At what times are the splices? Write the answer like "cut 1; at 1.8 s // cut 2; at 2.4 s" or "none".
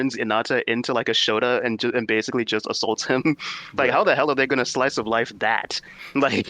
none